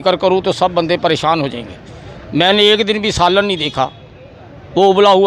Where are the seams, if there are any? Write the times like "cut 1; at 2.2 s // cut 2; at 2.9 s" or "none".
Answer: none